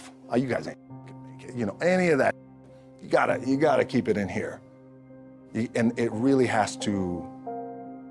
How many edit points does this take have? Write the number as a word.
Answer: one